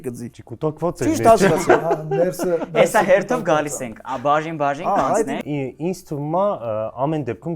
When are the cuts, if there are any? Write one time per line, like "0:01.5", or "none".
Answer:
none